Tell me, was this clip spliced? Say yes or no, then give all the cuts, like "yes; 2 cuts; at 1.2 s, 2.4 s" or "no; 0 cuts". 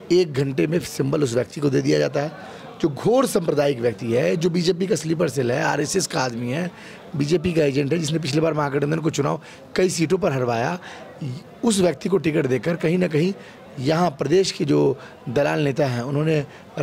no; 0 cuts